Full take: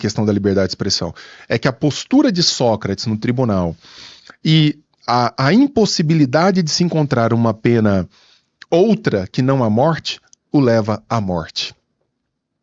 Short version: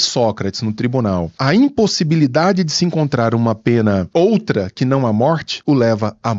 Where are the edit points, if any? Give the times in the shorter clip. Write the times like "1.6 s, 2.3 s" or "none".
1.4 s, 4.1 s, 5.5 s